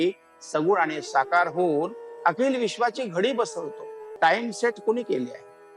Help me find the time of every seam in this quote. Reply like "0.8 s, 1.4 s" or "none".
4.1 s